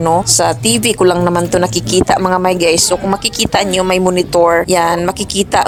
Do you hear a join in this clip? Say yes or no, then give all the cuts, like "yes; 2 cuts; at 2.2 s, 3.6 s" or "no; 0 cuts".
no; 0 cuts